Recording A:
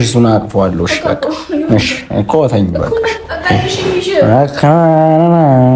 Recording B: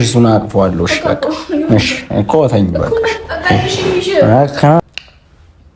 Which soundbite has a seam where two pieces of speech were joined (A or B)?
B